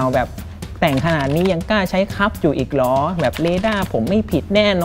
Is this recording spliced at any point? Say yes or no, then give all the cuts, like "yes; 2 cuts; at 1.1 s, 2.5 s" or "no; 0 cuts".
no; 0 cuts